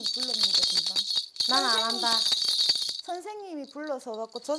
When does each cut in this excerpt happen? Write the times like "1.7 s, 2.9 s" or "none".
1.3 s